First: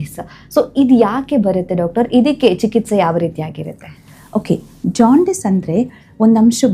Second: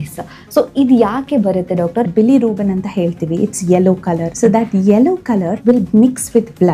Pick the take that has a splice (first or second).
second